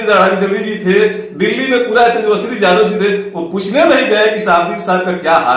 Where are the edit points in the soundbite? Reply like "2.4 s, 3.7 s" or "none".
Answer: none